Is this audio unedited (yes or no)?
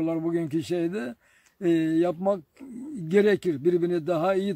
yes